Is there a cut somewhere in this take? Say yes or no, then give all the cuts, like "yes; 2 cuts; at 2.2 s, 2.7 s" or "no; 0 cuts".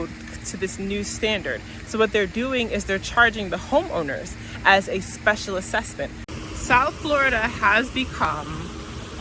yes; 1 cut; at 6.3 s